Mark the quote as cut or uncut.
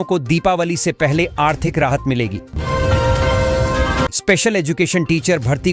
cut